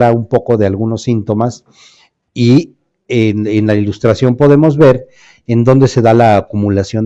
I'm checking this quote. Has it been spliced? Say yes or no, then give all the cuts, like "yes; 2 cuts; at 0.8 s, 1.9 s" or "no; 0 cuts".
yes; 1 cut; at 4.8 s